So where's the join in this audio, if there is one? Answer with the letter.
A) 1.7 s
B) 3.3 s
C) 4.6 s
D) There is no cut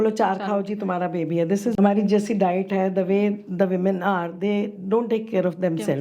A